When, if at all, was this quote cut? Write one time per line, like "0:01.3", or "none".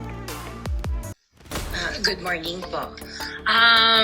0:01.8